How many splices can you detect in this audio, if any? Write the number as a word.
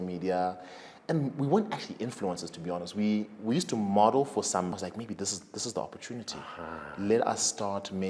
one